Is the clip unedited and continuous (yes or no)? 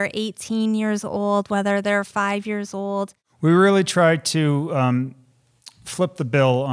no